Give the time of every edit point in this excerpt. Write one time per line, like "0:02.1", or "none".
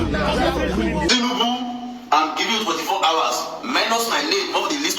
0:01.1